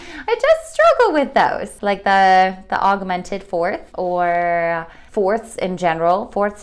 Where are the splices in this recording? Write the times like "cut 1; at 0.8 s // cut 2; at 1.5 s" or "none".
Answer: cut 1; at 1.7 s // cut 2; at 3.9 s // cut 3; at 5.0 s